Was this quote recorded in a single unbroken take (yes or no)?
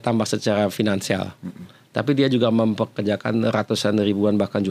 yes